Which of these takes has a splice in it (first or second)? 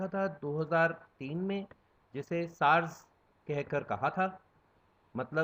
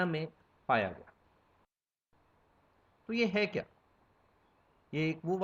second